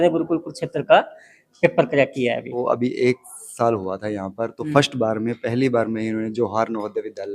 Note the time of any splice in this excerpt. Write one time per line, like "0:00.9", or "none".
0:02.6